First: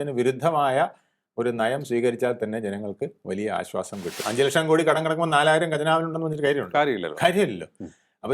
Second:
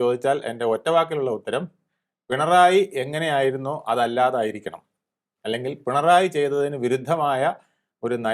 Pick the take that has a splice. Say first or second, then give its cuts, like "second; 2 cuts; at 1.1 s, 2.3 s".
first; 1 cut; at 4.2 s